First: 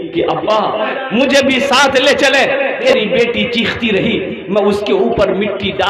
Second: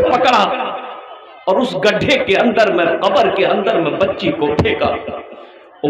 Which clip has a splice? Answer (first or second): first